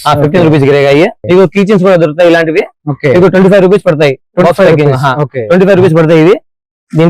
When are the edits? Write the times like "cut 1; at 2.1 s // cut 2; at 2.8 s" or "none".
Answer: cut 1; at 1.2 s